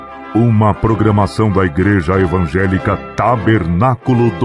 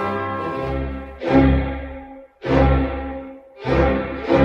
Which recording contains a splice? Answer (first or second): second